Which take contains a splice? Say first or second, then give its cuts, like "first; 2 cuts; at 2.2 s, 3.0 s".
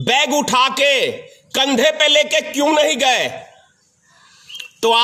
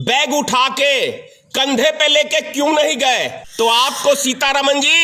second; 1 cut; at 3.4 s